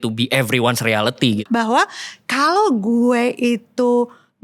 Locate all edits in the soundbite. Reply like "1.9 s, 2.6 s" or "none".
1.4 s